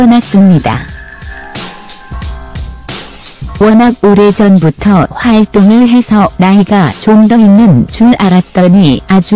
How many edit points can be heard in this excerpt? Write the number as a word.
one